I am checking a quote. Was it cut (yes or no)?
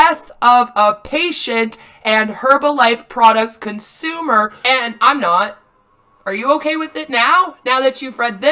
yes